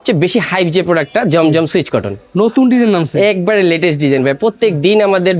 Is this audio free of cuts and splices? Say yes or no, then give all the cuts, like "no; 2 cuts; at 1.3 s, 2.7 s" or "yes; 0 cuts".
yes; 0 cuts